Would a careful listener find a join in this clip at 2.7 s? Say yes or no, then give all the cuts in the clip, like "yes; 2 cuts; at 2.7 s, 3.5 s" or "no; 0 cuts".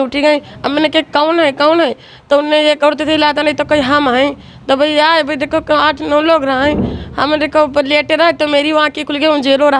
no; 0 cuts